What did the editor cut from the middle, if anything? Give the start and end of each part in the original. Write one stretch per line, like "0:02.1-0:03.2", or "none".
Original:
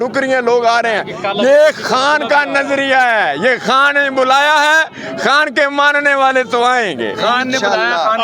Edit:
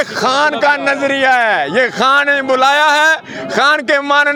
none